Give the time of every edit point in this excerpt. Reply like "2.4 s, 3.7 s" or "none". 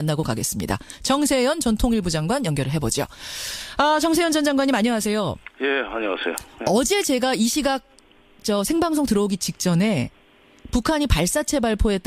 8.5 s